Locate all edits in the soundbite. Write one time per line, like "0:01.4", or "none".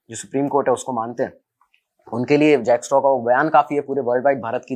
none